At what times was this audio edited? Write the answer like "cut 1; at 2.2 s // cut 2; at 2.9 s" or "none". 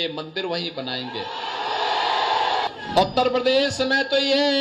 cut 1; at 2.7 s